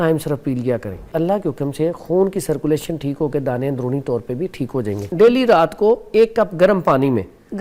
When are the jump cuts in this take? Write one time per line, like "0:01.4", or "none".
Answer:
0:01.1
0:05.0